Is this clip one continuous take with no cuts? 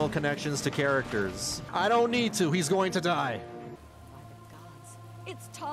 no; 2 cuts; at 1.6 s, 3.8 s

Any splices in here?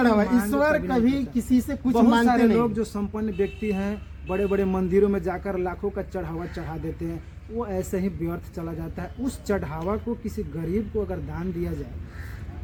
no; 0 cuts

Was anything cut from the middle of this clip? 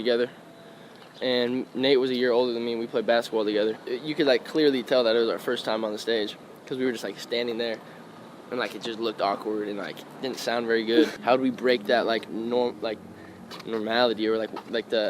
yes; 2 cuts; at 3.8 s, 11.2 s

